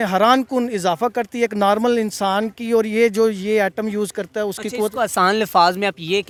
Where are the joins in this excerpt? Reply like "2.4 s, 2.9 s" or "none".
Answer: none